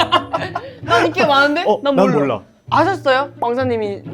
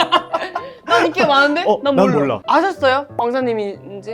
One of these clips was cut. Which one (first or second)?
second